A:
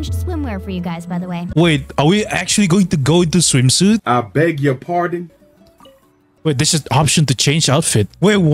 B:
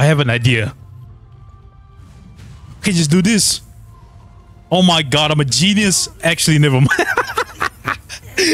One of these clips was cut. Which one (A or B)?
A